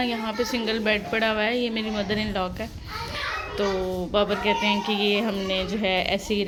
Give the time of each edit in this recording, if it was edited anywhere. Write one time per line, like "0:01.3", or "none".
none